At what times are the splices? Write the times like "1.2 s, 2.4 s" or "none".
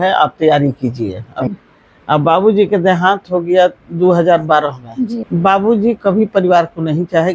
1.5 s, 5.2 s